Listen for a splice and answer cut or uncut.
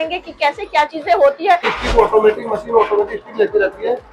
cut